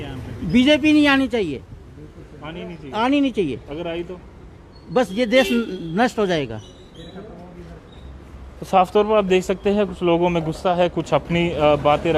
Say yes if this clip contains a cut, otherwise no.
no